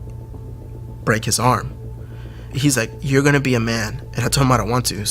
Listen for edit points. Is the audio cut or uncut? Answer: cut